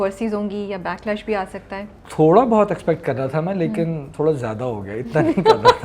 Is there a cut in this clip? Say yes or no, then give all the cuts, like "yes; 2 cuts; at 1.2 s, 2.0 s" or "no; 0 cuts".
no; 0 cuts